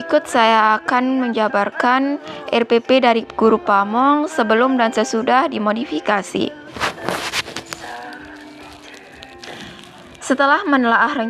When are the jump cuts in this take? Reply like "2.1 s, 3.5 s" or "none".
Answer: none